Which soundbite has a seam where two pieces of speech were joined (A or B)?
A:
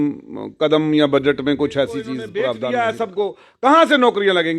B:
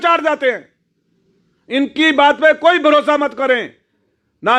A